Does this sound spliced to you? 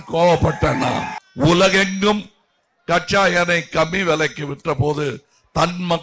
yes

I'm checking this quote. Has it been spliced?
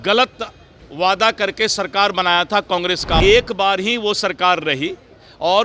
yes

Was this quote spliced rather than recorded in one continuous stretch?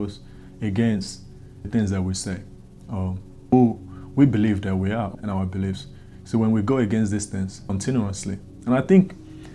yes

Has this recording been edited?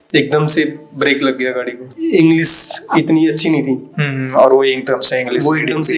yes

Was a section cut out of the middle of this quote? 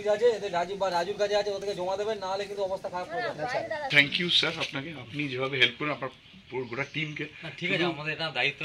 yes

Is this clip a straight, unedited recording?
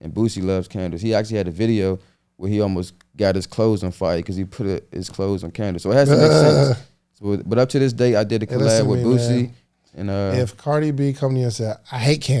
yes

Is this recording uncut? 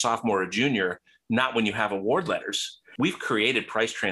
no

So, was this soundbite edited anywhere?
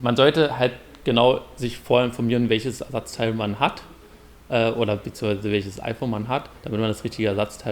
no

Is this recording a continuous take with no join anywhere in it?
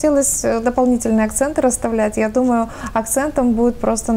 yes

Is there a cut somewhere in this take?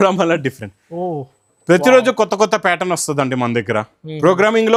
no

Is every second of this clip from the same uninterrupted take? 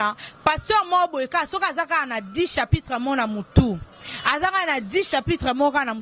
yes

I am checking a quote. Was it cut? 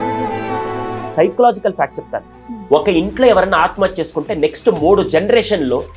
yes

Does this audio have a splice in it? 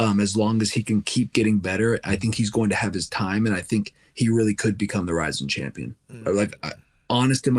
no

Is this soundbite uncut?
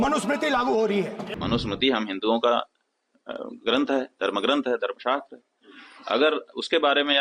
no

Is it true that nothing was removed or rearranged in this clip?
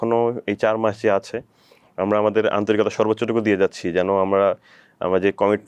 yes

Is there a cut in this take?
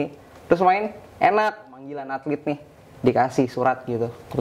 yes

